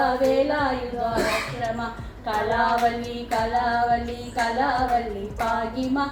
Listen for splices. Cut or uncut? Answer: uncut